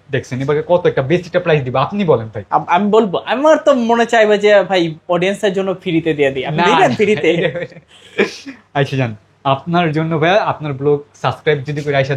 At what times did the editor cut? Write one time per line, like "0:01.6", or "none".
none

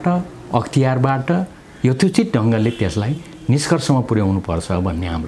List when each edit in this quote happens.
none

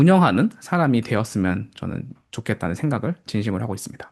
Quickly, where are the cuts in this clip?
none

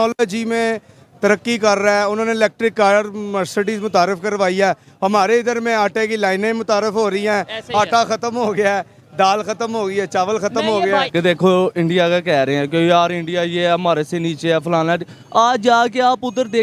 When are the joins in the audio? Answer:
0:11.1

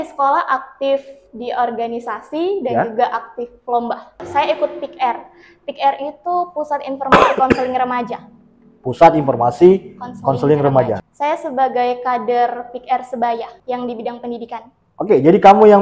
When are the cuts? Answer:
0:04.3
0:11.1
0:13.5

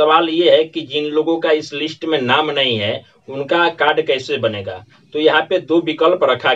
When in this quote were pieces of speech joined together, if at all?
none

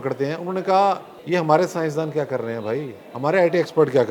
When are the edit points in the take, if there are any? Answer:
0:01.1

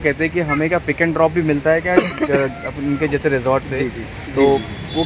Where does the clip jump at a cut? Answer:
none

